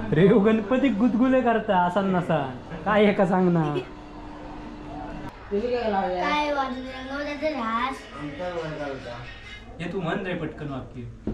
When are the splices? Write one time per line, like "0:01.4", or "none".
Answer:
0:04.9